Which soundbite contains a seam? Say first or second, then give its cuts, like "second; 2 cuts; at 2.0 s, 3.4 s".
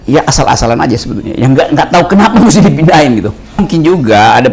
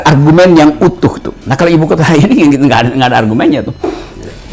first; 1 cut; at 3.6 s